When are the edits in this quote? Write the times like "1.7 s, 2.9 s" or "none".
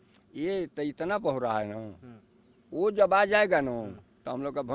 none